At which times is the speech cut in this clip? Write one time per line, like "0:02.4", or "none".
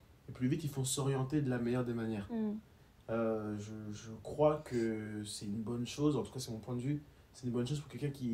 none

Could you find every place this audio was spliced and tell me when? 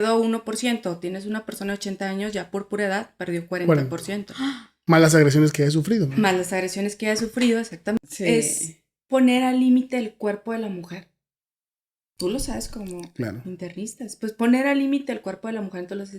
0:08.0

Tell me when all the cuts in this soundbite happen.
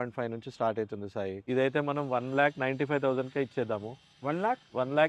0:01.4

